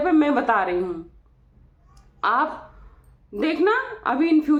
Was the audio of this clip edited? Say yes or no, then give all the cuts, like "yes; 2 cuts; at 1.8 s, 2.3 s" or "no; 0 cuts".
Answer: no; 0 cuts